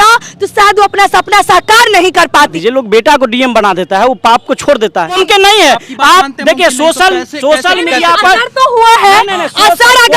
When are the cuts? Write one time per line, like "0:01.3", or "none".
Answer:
0:02.5
0:05.2